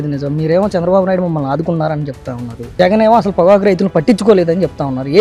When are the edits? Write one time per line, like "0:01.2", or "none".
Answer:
none